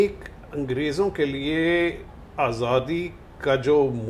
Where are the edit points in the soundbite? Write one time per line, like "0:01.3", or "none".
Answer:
none